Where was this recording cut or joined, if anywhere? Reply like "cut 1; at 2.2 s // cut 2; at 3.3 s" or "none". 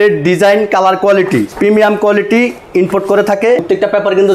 cut 1; at 1.5 s // cut 2; at 3.6 s